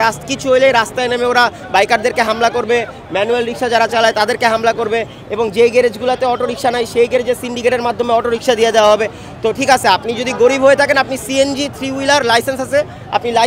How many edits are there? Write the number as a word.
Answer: zero